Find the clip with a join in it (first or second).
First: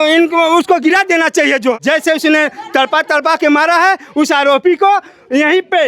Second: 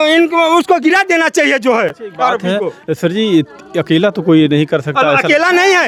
first